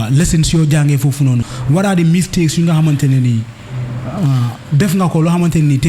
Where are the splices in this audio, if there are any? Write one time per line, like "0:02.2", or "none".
0:01.5